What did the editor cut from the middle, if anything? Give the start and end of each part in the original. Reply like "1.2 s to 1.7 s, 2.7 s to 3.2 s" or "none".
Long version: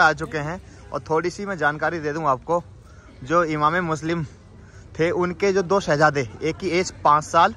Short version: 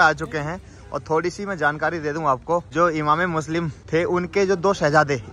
2.7 s to 3.2 s, 4.3 s to 4.8 s